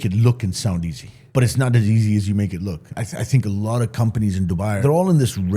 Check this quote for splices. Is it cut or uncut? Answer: cut